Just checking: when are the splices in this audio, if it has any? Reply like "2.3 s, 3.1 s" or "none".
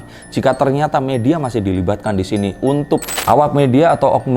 3.1 s